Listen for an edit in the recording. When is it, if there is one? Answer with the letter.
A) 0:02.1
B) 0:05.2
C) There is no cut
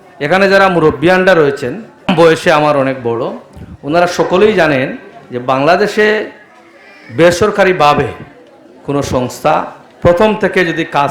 A